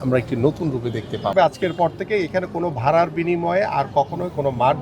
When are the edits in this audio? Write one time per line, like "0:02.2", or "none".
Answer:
0:01.3